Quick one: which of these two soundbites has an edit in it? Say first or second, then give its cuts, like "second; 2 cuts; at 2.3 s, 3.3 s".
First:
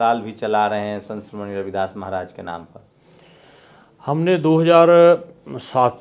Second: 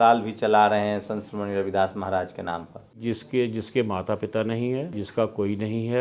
second; 2 cuts; at 3.0 s, 5.0 s